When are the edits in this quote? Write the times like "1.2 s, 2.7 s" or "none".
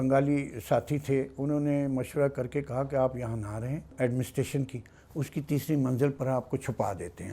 3.9 s